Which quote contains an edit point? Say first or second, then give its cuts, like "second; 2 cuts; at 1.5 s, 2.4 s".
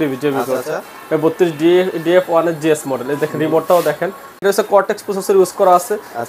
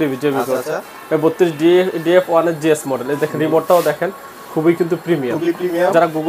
first; 1 cut; at 4.4 s